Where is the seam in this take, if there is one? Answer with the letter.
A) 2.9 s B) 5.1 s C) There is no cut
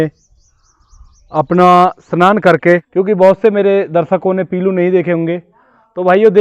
A